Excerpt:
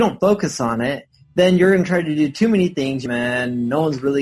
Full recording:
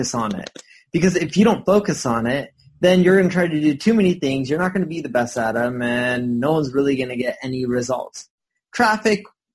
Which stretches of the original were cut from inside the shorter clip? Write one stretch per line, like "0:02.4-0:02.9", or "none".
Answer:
0:04.5-0:05.7